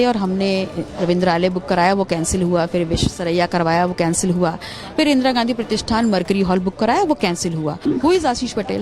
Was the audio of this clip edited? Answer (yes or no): yes